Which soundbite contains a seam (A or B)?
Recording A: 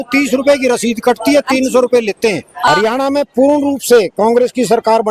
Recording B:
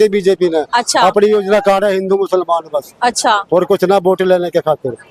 A